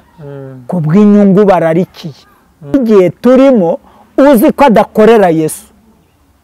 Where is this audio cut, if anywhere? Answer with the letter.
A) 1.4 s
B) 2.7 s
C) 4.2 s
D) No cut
B